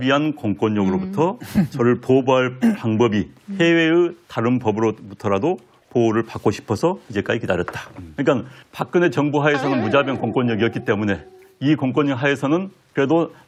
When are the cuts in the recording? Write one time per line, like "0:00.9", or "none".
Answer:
none